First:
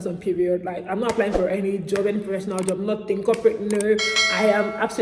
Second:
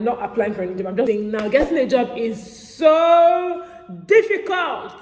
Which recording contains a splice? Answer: second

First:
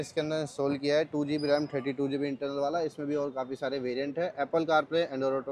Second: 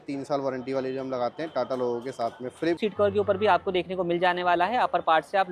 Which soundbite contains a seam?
second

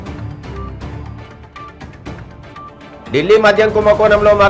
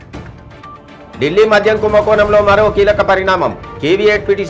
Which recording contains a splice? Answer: first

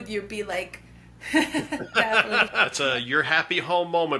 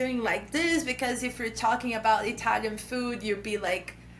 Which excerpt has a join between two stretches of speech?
first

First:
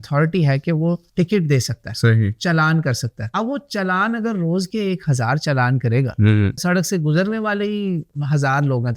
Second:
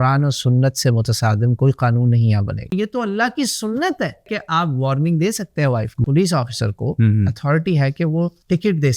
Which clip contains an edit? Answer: second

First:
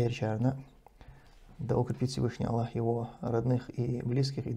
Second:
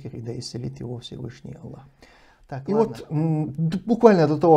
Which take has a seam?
second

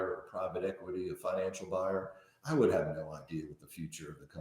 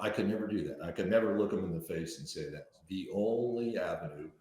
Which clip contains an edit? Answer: second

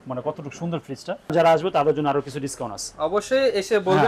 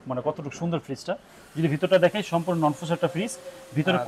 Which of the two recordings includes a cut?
first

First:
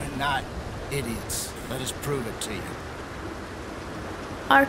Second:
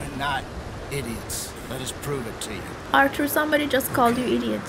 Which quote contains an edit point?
second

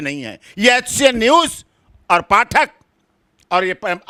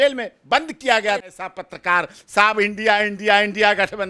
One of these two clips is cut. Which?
second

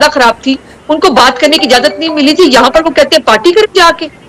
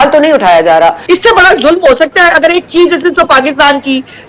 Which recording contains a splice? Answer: second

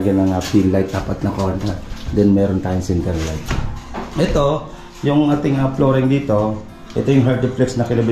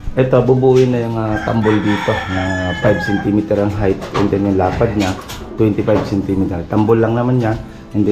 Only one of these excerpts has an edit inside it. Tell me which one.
first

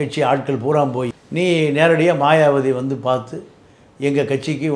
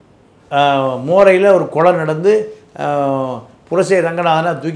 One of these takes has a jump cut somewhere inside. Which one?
first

